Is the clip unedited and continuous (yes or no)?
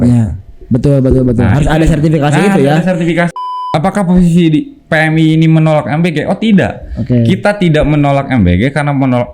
no